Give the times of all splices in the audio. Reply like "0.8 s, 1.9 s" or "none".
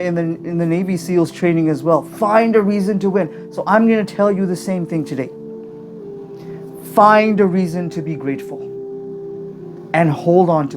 5.5 s, 6.8 s